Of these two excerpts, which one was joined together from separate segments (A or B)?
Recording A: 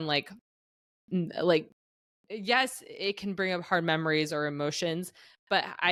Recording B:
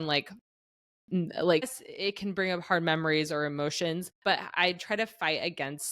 B